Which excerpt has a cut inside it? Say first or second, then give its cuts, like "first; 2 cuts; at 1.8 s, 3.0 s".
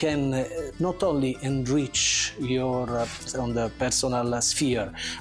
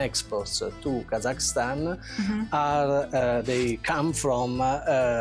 first; 1 cut; at 3.3 s